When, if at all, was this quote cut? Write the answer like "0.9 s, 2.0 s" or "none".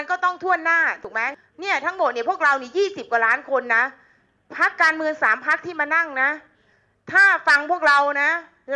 1.1 s